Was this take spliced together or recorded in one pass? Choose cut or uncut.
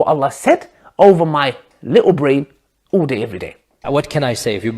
cut